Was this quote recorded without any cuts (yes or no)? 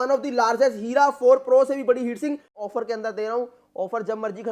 no